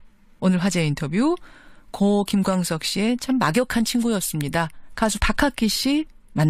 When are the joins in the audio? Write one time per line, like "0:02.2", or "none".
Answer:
0:05.4